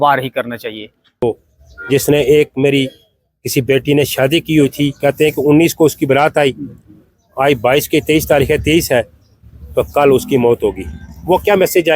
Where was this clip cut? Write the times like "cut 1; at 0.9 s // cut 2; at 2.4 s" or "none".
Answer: cut 1; at 1.2 s